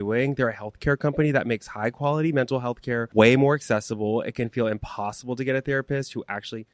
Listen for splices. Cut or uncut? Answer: uncut